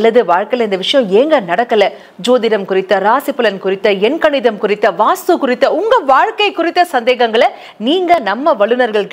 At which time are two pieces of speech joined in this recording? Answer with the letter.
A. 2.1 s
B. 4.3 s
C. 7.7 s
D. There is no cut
D